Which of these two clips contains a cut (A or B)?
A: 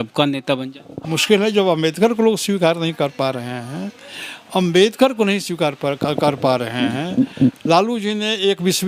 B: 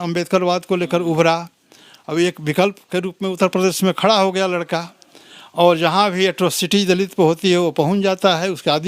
A